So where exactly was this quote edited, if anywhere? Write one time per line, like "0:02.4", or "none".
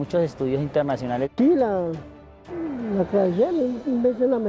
0:01.2

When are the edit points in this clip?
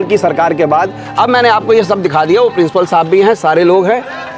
none

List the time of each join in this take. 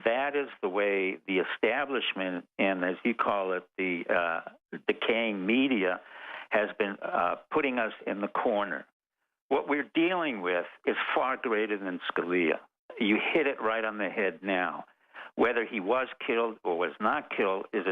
0:03.0

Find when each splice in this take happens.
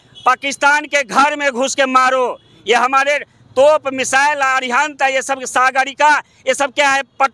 none

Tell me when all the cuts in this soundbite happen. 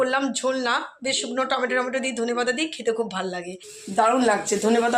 0:03.5

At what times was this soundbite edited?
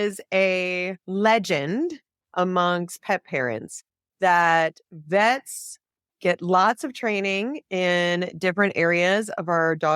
0:00.9

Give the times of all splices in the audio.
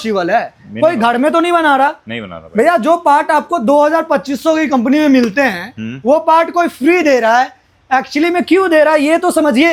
none

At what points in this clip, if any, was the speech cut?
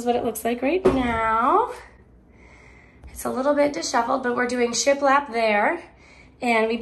none

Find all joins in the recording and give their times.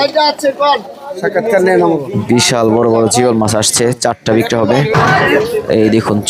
0:04.9

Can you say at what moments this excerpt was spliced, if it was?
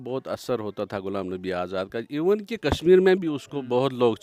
none

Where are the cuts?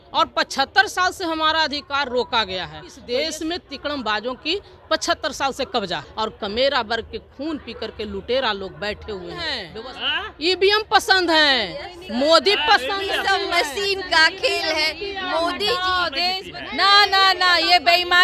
0:02.9
0:06.1
0:09.6
0:16.3

